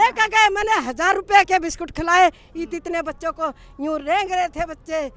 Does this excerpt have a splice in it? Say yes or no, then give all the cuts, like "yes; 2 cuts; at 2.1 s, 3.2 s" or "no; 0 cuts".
no; 0 cuts